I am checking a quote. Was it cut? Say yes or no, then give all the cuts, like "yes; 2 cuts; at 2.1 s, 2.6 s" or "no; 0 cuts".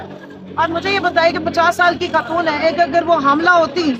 no; 0 cuts